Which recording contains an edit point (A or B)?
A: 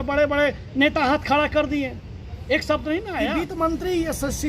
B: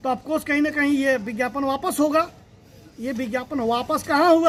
A